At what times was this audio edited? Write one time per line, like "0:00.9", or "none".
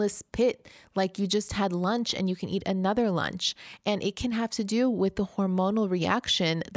none